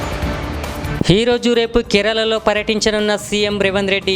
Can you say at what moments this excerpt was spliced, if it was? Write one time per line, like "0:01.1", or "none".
0:01.0